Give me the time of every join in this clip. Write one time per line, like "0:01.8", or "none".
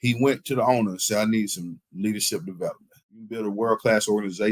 0:03.4

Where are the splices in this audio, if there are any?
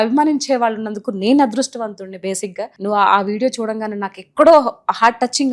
0:02.7

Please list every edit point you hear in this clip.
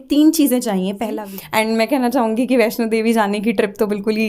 0:01.2

